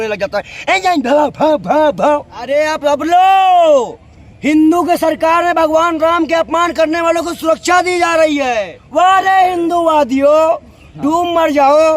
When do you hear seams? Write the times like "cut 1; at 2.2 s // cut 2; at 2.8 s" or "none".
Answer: cut 1; at 2.5 s // cut 2; at 8.8 s